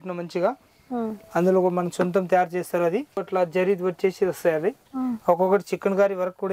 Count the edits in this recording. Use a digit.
1